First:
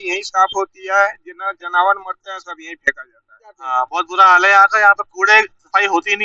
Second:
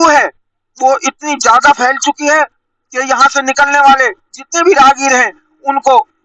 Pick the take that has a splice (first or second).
first